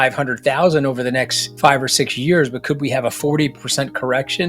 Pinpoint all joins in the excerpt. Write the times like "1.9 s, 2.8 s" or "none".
1.4 s